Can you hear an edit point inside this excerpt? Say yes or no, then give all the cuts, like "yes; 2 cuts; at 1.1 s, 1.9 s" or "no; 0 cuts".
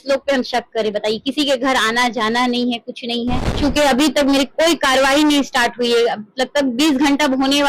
yes; 1 cut; at 3.5 s